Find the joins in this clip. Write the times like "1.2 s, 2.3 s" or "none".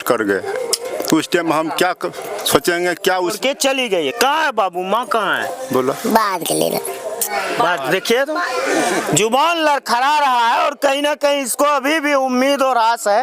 3.4 s